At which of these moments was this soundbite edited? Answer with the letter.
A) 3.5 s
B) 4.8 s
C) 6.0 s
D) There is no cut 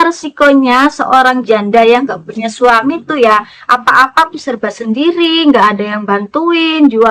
D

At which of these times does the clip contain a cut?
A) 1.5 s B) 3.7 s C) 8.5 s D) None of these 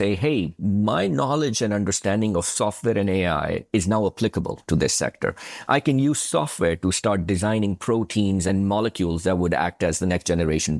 C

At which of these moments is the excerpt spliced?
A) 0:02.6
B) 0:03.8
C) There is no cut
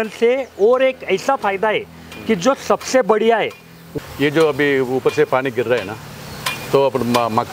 B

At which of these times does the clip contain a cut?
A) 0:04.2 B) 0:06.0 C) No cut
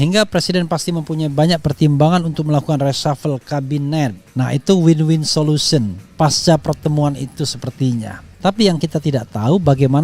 A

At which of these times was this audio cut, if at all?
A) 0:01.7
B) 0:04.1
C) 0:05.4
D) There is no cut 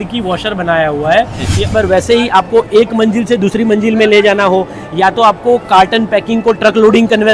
A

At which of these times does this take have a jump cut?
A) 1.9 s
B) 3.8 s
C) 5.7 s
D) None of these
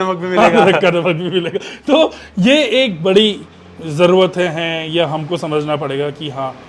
D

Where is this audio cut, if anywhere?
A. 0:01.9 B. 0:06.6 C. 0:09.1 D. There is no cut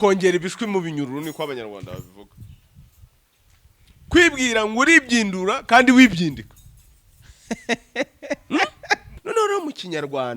C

